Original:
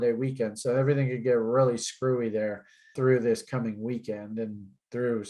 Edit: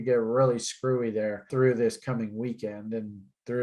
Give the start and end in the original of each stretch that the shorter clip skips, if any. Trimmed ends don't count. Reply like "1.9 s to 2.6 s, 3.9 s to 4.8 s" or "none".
2.6 s to 2.9 s